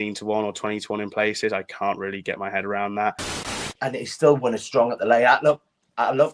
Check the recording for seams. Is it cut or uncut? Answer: cut